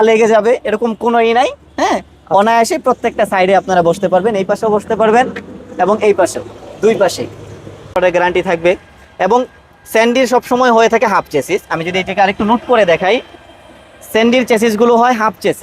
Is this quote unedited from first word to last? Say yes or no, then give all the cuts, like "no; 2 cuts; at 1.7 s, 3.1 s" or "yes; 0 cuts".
no; 1 cut; at 7.9 s